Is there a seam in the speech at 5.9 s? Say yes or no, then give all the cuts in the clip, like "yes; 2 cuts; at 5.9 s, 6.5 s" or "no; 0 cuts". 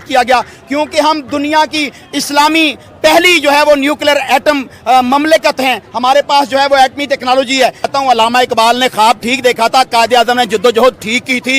no; 1 cut; at 7.8 s